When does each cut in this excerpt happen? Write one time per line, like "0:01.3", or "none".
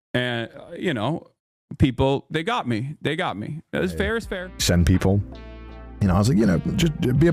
0:04.3